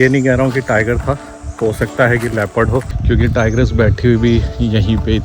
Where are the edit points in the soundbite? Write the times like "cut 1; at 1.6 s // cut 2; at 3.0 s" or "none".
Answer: cut 1; at 2.9 s